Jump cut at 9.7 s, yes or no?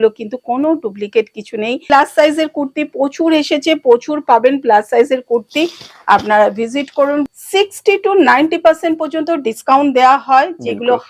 no